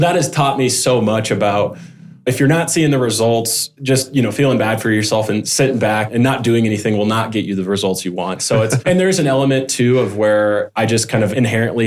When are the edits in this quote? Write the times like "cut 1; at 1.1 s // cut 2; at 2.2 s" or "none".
none